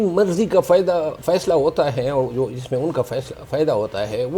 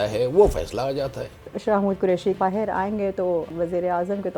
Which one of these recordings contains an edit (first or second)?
second